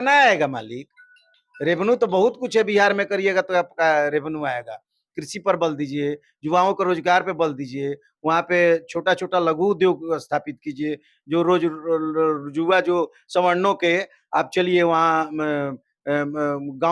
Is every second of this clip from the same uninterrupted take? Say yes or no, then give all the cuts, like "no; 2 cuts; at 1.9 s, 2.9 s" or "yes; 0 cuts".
yes; 0 cuts